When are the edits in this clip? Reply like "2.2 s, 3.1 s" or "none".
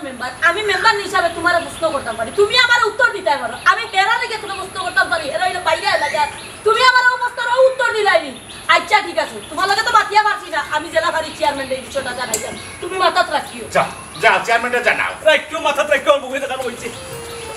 none